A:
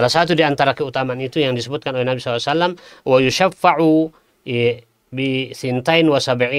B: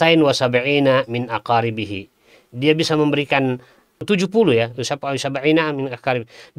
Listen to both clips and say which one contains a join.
B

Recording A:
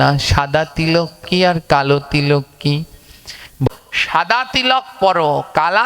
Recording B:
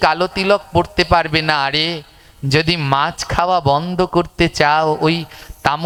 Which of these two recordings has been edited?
A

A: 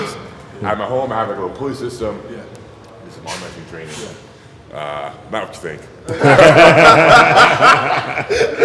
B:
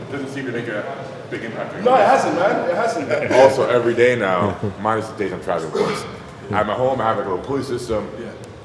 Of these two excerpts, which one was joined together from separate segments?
B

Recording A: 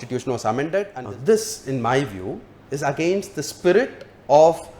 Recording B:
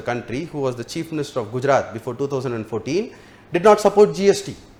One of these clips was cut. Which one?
A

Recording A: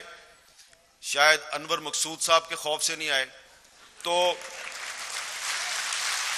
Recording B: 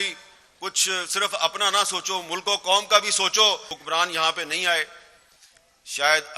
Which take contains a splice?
B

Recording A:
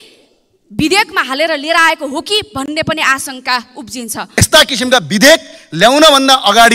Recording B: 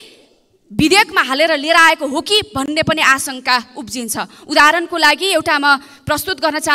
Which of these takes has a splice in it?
A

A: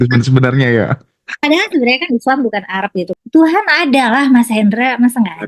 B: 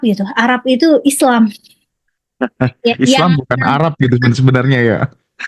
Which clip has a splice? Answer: A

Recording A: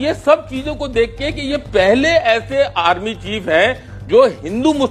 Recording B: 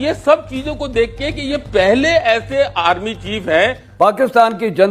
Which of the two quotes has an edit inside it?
B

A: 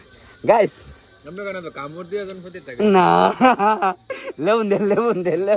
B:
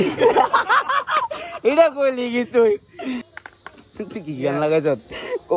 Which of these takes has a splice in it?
B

